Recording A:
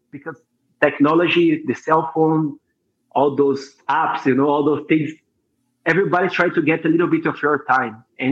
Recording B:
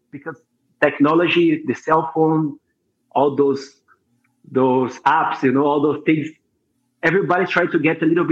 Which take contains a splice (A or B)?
A